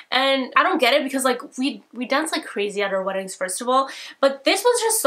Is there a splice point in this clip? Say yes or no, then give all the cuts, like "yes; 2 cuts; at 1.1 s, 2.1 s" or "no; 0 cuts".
no; 0 cuts